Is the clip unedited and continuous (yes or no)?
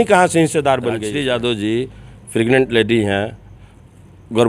no